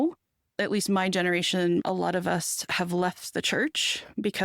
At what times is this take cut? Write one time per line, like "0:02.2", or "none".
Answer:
0:01.8